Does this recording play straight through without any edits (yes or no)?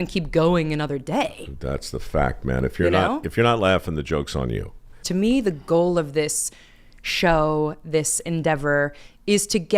no